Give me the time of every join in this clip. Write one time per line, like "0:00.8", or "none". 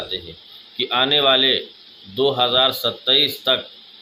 none

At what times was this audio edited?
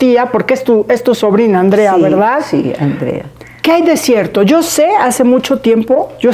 none

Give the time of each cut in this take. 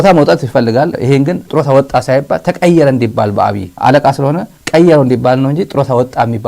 0:00.9

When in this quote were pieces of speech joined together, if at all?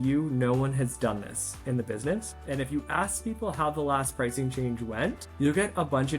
0:02.3
0:05.2

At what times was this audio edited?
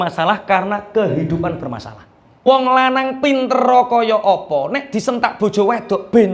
0:02.5

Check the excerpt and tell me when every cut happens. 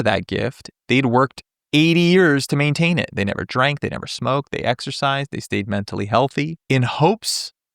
0:06.6

